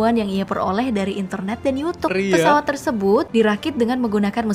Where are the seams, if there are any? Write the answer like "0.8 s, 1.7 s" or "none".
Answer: 2.1 s, 3.3 s